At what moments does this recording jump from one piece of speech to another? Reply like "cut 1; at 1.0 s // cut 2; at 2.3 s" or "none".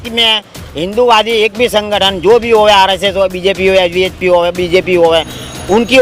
none